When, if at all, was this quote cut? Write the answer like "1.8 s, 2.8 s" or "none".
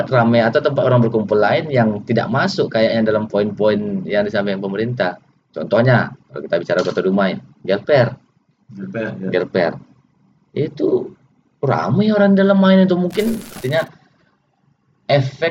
13.6 s